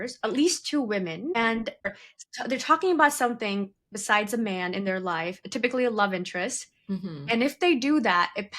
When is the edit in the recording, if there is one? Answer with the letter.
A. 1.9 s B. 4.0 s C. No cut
A